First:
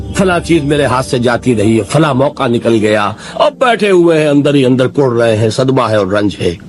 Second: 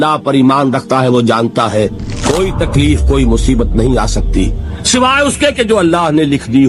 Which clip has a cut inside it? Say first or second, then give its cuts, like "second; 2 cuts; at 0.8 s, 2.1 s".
second; 1 cut; at 2.1 s